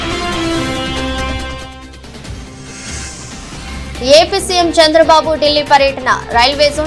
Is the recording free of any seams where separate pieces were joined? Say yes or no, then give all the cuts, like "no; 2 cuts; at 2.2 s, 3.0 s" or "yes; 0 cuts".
yes; 0 cuts